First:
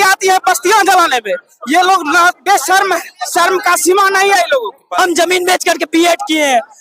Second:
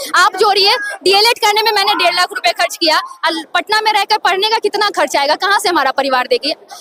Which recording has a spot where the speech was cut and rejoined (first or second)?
first